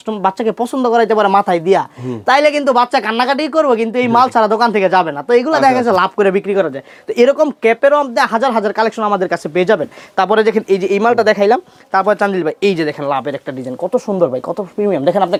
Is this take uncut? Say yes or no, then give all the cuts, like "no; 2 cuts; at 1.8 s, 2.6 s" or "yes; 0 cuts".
yes; 0 cuts